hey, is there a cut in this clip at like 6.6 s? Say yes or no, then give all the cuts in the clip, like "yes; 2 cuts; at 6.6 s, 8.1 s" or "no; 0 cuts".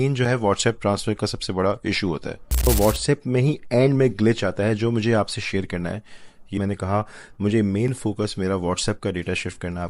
yes; 2 cuts; at 2.6 s, 6.6 s